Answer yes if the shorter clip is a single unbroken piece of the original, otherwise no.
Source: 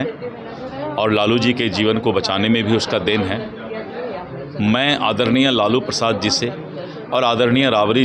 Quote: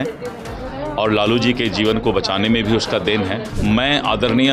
no